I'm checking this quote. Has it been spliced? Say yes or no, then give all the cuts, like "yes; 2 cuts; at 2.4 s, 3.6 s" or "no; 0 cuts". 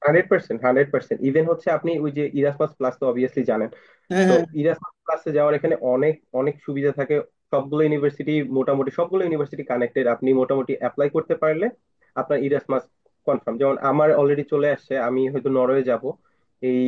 no; 0 cuts